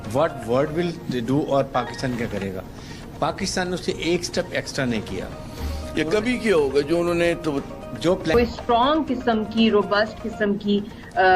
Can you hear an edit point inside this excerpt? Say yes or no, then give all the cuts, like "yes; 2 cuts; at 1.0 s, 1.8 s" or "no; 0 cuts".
yes; 1 cut; at 8.3 s